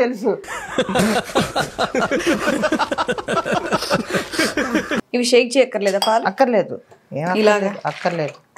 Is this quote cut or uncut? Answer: cut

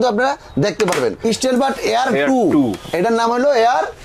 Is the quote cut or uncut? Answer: cut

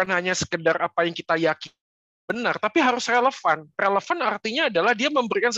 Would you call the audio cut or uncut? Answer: uncut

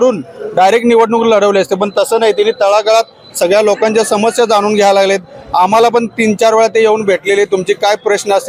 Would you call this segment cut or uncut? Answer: uncut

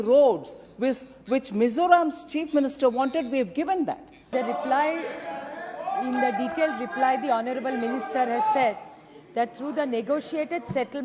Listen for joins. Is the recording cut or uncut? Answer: cut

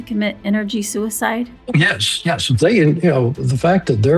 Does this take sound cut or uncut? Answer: uncut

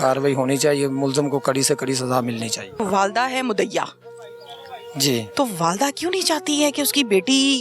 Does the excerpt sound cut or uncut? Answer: cut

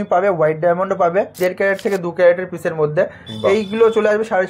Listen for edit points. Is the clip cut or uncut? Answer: cut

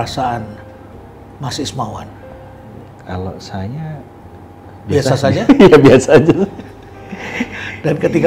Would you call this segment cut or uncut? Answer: uncut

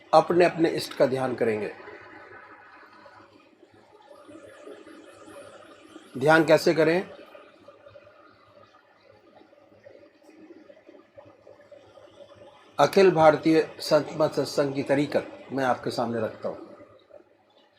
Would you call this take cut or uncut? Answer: cut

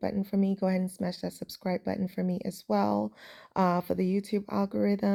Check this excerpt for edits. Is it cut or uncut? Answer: uncut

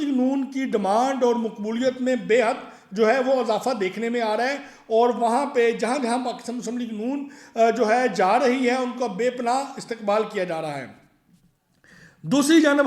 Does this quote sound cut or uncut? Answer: uncut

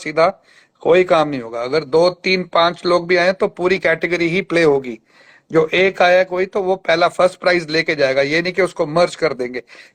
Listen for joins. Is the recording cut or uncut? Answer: uncut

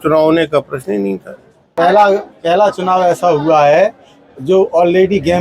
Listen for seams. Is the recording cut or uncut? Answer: cut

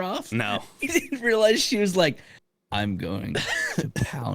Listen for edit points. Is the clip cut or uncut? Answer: uncut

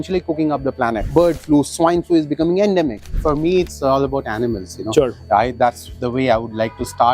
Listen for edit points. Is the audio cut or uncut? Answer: cut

